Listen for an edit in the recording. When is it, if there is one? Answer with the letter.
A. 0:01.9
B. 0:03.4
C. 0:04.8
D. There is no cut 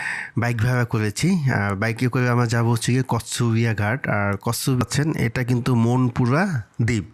C